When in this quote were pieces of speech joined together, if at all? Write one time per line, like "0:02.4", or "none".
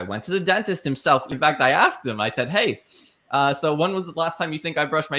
0:01.3